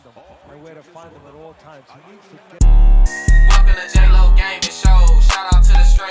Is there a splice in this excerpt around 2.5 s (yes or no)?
yes